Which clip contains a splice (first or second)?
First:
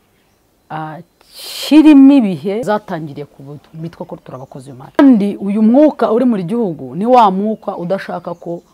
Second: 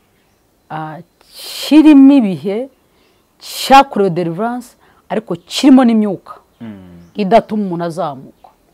first